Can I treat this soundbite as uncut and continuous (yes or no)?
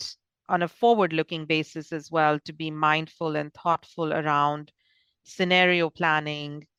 yes